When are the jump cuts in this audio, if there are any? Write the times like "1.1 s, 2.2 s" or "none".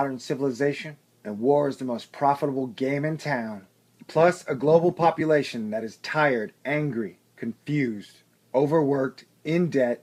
none